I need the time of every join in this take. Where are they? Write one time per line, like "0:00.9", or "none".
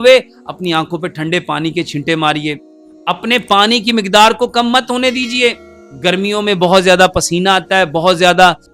none

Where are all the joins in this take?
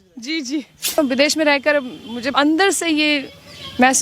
0:01.0
0:02.3

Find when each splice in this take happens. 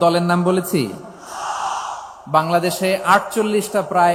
none

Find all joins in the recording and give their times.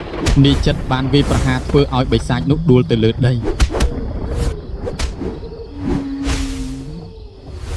none

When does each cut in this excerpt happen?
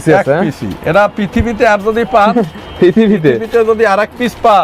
none

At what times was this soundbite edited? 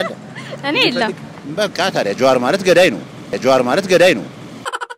none

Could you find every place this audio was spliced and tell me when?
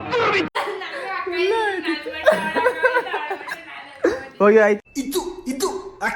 none

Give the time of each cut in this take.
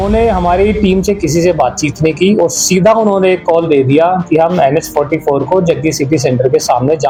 none

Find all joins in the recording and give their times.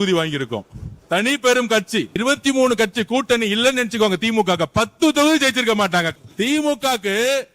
0:02.2
0:06.1

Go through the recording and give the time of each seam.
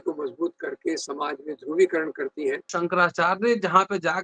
0:02.7

